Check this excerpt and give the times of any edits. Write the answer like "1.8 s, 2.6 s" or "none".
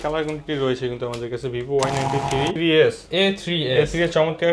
2.6 s